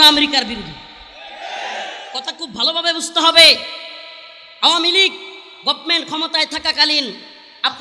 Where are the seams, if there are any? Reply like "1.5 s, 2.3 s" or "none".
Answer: none

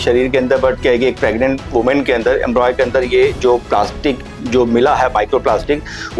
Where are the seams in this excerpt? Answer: none

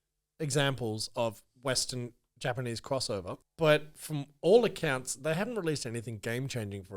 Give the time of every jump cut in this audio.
3.4 s

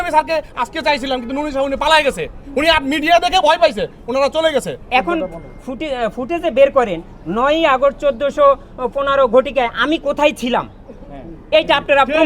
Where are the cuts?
4.8 s

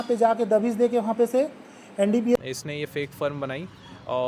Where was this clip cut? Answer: 2.4 s

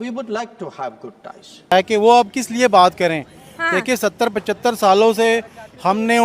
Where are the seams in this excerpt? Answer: 1.7 s

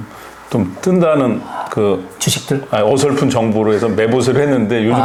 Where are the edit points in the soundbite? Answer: none

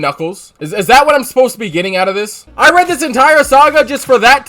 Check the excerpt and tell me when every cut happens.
2.4 s

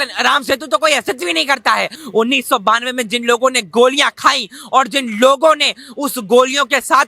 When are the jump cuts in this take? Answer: 2.0 s

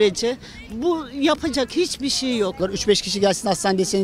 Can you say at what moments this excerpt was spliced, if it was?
2.6 s

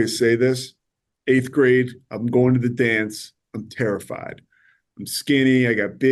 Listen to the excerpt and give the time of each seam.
none

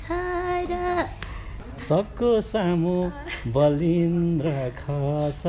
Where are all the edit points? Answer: 1.6 s

